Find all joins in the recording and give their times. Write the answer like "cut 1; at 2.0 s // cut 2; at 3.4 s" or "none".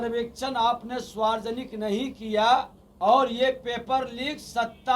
cut 1; at 2.8 s